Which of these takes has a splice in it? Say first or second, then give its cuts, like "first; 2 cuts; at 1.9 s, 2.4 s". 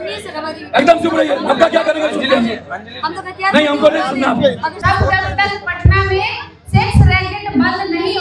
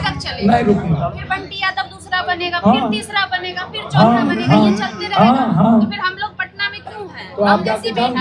first; 1 cut; at 4.8 s